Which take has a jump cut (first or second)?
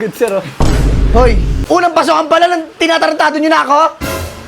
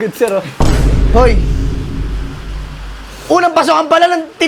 first